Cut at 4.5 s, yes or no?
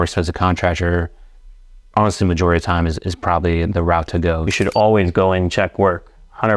yes